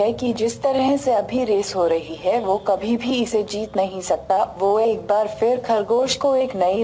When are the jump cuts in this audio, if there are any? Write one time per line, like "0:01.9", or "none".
0:05.3